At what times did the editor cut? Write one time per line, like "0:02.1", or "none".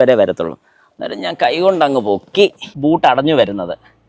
0:02.7